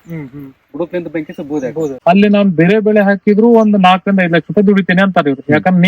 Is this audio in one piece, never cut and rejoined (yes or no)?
no